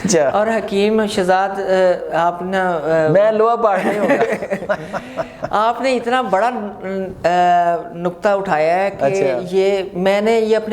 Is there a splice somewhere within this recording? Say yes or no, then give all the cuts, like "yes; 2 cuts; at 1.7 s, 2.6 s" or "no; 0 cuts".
no; 0 cuts